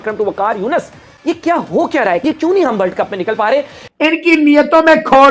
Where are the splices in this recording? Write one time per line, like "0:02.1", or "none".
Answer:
0:02.2
0:03.8

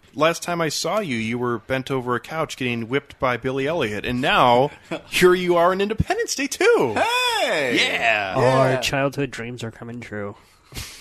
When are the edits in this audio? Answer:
none

